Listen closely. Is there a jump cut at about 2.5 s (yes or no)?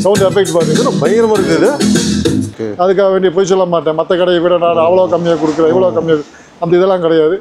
yes